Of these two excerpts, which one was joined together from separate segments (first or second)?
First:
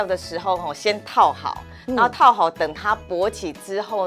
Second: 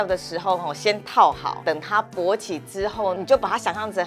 second